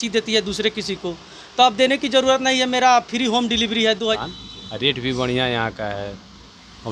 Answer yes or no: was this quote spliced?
yes